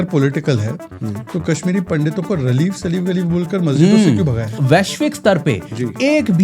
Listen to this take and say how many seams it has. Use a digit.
1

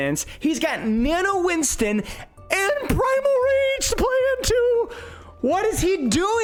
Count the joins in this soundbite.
0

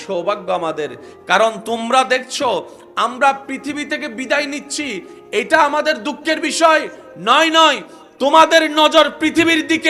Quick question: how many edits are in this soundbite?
0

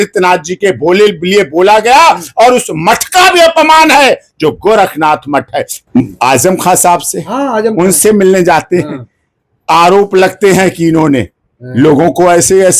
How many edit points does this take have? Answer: 1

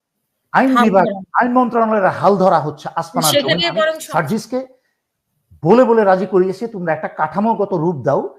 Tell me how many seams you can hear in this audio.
1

